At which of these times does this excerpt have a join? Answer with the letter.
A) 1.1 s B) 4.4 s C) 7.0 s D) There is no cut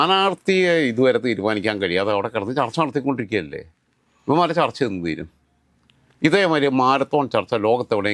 D